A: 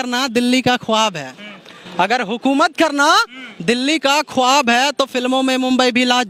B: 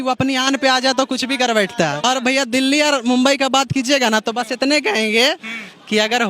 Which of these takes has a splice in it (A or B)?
B